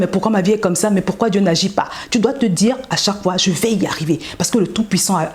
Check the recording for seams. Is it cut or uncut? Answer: uncut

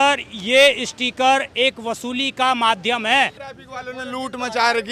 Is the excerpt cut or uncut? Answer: cut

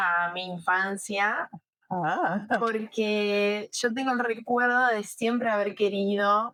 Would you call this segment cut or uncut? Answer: uncut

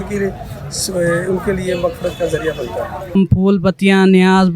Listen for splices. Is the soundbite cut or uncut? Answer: cut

